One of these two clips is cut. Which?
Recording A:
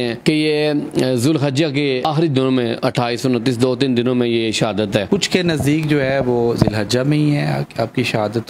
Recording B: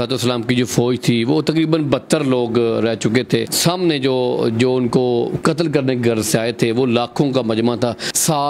A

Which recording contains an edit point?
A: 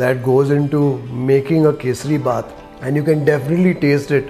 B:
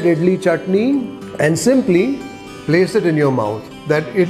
B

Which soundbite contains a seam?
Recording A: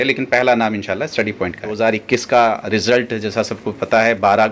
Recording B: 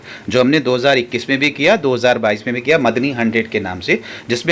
A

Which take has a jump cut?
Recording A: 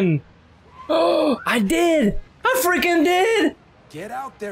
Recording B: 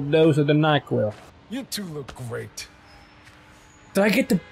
B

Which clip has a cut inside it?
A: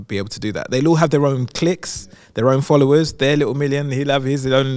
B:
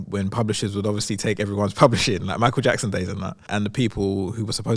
B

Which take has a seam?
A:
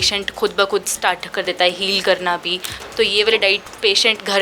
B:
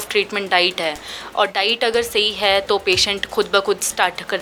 A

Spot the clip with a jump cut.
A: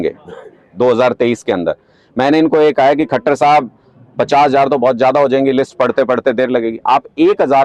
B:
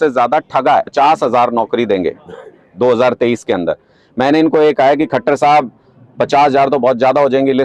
B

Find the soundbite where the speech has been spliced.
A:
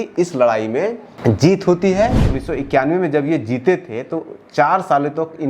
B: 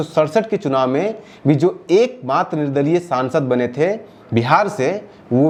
A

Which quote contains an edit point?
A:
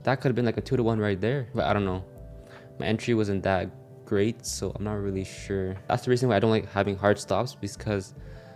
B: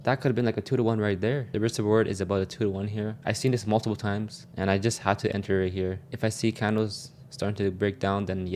B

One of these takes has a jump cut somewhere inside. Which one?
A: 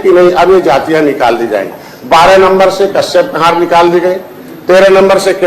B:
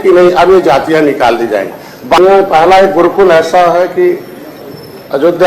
B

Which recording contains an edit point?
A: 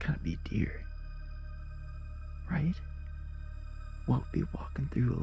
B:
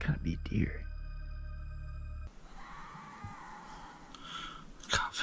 B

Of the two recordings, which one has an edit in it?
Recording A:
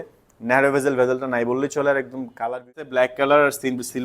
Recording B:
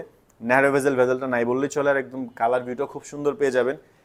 A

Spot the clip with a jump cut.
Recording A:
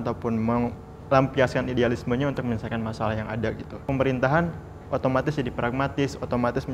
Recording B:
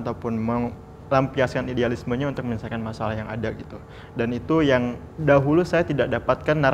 A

